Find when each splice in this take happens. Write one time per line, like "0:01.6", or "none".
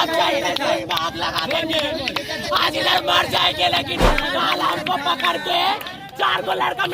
0:04.1